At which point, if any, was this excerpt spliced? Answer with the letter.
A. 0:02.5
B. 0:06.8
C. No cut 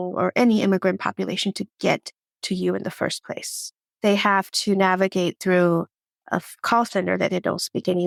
C